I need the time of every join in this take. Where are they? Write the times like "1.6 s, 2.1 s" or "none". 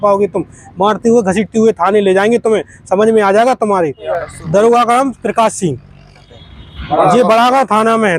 4.1 s, 6.2 s